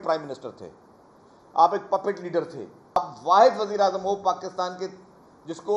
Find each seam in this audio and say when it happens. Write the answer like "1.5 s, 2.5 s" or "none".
3.0 s